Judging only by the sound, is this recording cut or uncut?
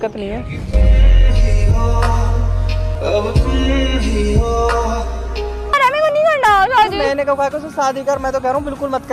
cut